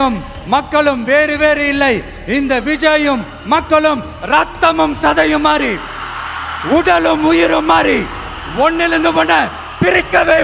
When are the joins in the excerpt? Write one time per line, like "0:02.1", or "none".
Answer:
none